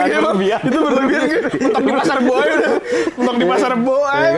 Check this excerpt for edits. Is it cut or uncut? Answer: uncut